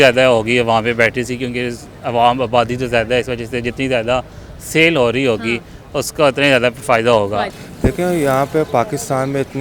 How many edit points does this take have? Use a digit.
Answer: 1